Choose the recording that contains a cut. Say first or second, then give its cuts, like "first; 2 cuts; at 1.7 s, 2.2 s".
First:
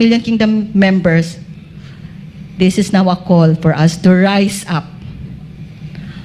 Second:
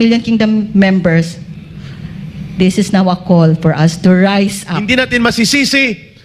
second; 1 cut; at 4.7 s